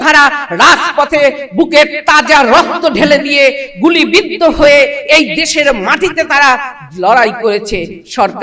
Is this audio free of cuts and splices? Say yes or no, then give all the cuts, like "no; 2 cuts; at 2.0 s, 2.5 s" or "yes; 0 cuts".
yes; 0 cuts